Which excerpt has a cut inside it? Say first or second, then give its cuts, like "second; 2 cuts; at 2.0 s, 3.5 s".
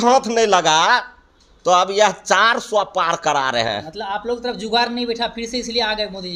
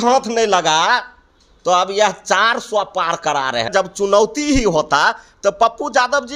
second; 1 cut; at 3.7 s